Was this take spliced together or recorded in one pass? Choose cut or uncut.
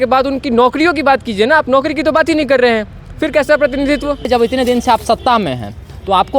cut